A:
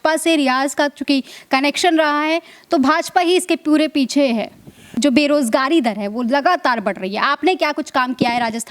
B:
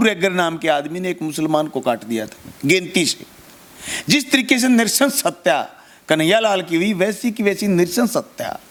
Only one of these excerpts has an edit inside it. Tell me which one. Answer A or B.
A